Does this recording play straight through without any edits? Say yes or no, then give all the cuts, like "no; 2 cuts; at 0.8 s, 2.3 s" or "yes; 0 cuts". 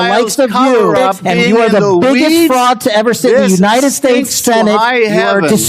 no; 1 cut; at 1.3 s